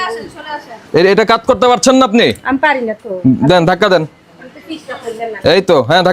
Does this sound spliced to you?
no; 0 cuts

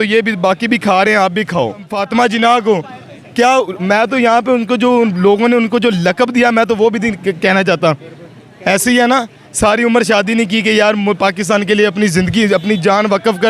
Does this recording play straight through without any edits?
no; 1 cut; at 1.9 s

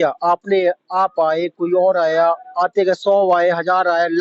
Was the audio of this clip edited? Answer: no; 0 cuts

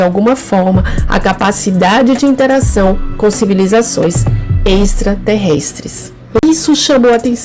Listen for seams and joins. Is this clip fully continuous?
no; 1 cut; at 6.4 s

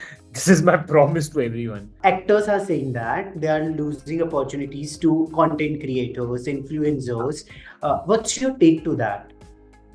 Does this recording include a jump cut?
yes; 1 cut; at 1.9 s

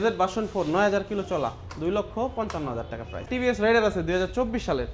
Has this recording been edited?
yes; 1 cut; at 3.3 s

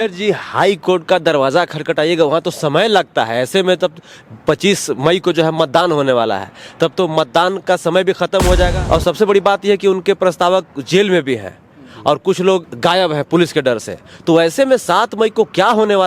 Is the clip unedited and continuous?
no; 2 cuts; at 8.7 s, 12.7 s

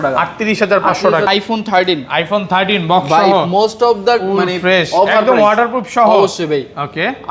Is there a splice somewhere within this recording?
yes; 1 cut; at 1.3 s

